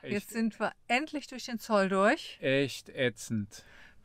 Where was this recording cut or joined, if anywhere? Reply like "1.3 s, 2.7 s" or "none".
none